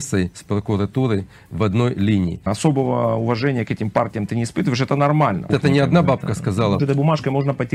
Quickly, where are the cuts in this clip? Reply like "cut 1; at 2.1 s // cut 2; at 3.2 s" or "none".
cut 1; at 2.5 s // cut 2; at 5.5 s // cut 3; at 6.8 s